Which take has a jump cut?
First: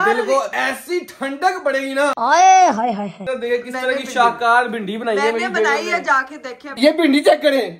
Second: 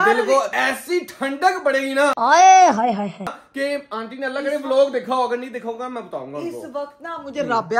first; 2 cuts; at 3.2 s, 6.7 s

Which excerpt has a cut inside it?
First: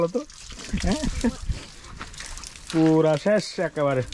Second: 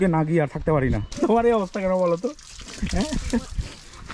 second; 1 cut; at 1.1 s

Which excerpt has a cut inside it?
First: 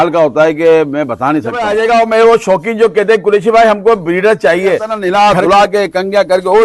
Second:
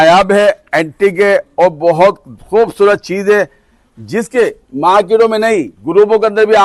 first; 2 cuts; at 1.5 s, 4.9 s

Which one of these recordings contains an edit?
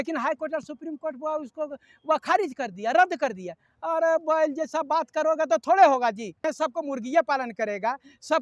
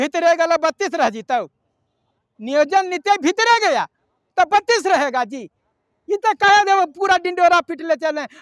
first; 1 cut; at 6.5 s

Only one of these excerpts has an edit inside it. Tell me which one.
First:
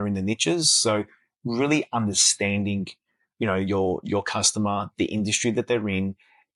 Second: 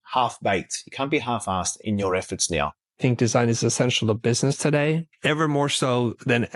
second; 3 cuts; at 1.8 s, 3.0 s, 5.1 s

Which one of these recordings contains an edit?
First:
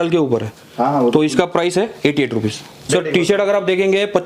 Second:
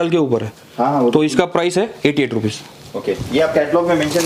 first; 1 cut; at 2.9 s

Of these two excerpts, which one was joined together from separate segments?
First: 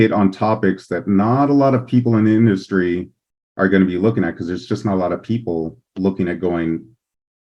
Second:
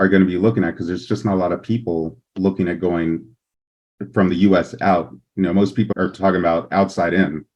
second; 1 cut; at 5.9 s

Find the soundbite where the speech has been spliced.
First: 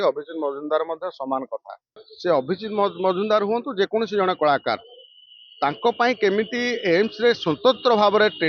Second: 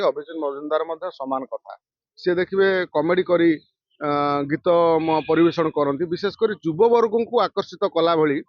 first; 1 cut; at 2.1 s

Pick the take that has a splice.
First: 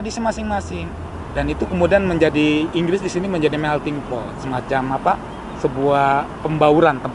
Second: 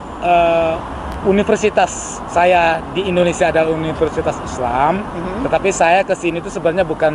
second; 1 cut; at 1.0 s

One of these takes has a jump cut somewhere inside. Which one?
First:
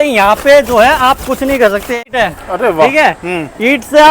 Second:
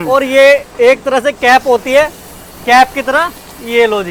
first; 1 cut; at 2.1 s

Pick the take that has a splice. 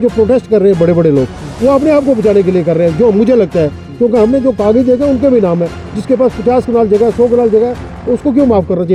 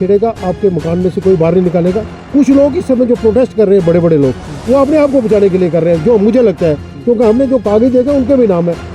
second; 1 cut; at 2.2 s

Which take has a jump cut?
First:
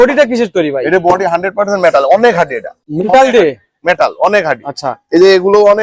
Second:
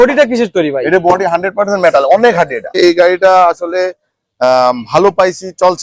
second; 1 cut; at 2.8 s

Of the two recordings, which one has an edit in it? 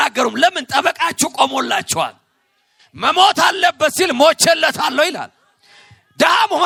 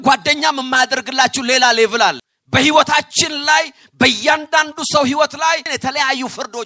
second; 2 cuts; at 2.3 s, 5.7 s

